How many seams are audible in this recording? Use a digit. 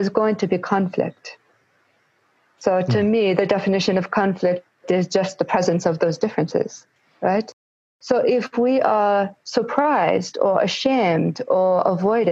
0